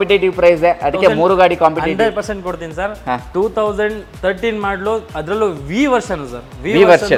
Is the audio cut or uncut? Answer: uncut